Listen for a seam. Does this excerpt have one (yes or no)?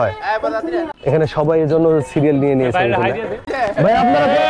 yes